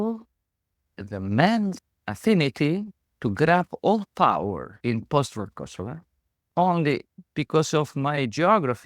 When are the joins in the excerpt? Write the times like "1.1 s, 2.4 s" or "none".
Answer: 1.8 s, 7.2 s